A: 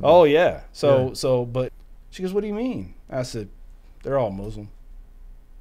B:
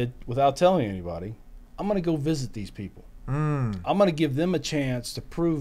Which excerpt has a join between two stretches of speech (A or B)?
A